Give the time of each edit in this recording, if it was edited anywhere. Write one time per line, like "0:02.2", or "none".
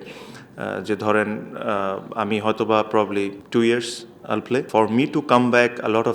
0:04.7